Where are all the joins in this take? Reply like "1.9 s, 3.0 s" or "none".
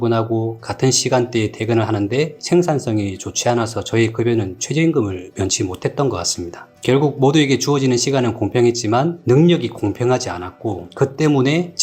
none